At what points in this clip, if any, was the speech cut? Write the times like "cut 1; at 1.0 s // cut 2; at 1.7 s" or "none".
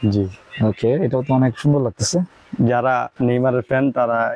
none